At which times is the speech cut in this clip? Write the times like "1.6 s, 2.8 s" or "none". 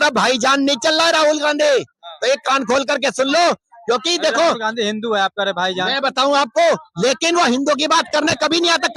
none